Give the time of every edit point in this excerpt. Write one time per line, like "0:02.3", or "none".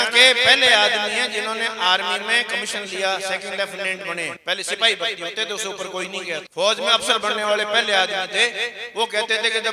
none